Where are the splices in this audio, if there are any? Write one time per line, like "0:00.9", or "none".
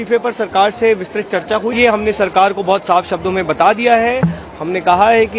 0:01.7